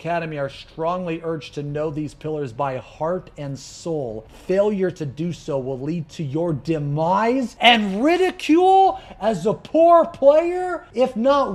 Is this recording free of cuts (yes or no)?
yes